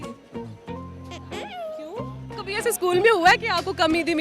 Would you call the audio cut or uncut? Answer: cut